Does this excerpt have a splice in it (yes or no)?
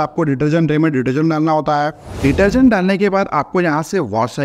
yes